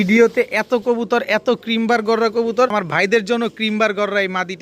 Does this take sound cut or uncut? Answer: cut